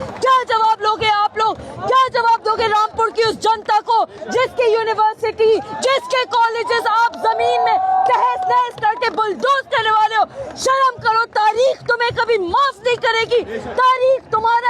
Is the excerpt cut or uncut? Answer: uncut